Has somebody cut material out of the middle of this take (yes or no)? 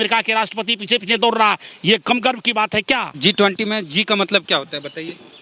yes